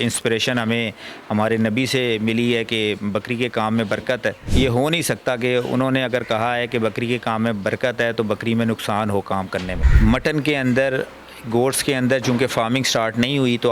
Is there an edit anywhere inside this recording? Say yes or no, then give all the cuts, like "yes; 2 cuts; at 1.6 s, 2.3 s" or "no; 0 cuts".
yes; 2 cuts; at 4.4 s, 9.8 s